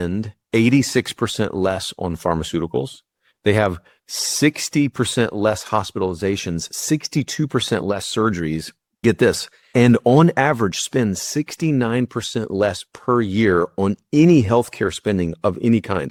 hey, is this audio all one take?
yes; 0 cuts

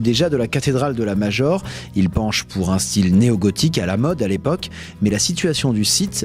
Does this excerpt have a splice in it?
no; 0 cuts

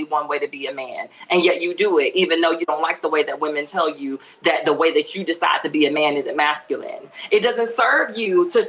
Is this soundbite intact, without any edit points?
yes; 0 cuts

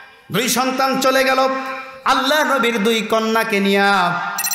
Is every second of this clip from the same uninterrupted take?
yes; 0 cuts

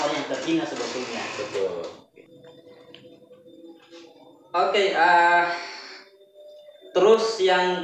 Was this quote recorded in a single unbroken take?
yes; 0 cuts

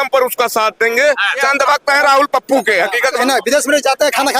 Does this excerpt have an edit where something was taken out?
yes; 2 cuts; at 1.4 s, 3.2 s

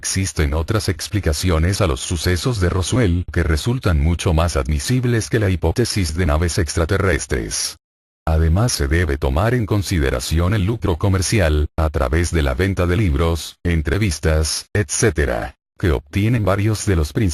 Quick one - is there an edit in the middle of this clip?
no; 0 cuts

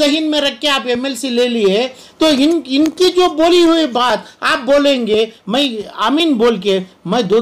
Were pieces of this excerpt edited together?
no; 0 cuts

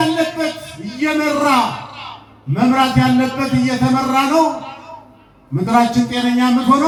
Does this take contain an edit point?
no; 0 cuts

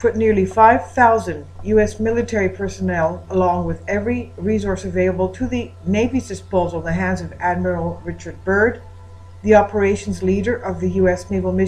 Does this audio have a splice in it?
no; 0 cuts

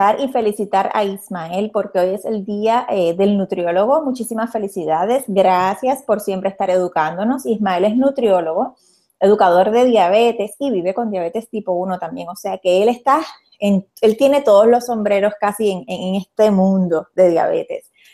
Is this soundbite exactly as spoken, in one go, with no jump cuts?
no; 1 cut; at 4.0 s

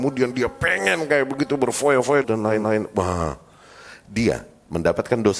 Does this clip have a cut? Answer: no; 0 cuts

